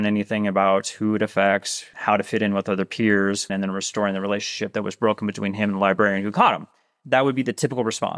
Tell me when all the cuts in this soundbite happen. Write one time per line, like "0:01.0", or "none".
0:01.8
0:03.5
0:07.0